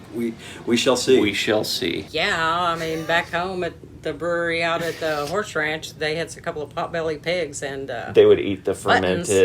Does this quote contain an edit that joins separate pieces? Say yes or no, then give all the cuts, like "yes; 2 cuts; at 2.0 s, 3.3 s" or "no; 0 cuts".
yes; 1 cut; at 2.1 s